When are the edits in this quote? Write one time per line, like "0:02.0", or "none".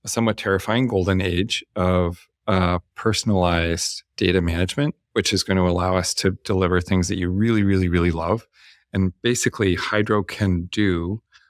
none